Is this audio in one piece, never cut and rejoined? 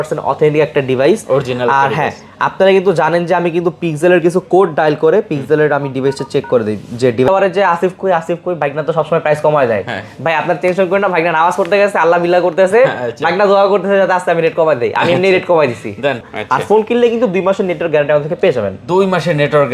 no; 2 cuts; at 7.3 s, 16.3 s

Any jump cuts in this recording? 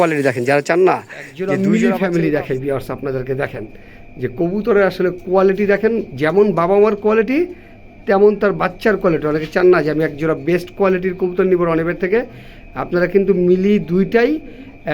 yes; 1 cut; at 1.4 s

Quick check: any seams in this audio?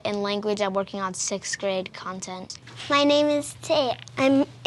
yes; 1 cut; at 2.5 s

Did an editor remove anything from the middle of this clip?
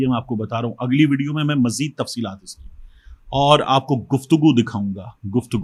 no; 0 cuts

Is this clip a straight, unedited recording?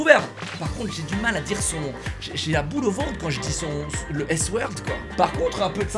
no; 1 cut; at 5.1 s

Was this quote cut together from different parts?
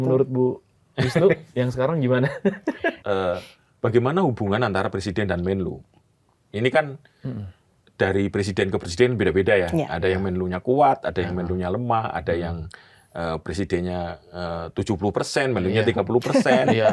yes; 1 cut; at 2.9 s

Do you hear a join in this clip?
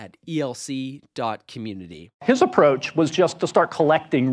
yes; 1 cut; at 2.2 s

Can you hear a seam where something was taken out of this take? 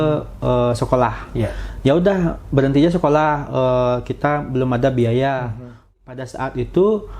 yes; 1 cut; at 5.9 s

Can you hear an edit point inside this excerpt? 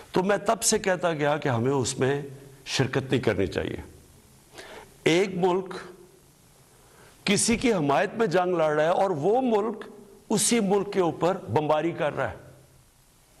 no; 0 cuts

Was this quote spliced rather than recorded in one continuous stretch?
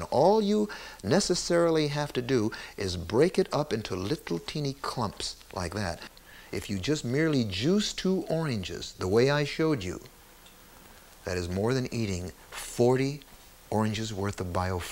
yes; 1 cut; at 6.2 s

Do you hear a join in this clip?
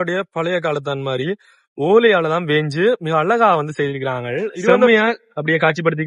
yes; 1 cut; at 4.9 s

